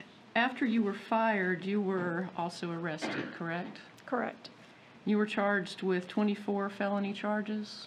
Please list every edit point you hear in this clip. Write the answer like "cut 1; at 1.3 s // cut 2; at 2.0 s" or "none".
none